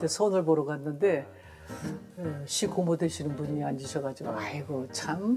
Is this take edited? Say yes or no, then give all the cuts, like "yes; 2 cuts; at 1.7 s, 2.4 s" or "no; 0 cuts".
no; 0 cuts